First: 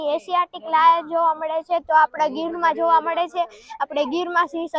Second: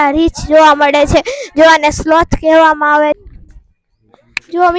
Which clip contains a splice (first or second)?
second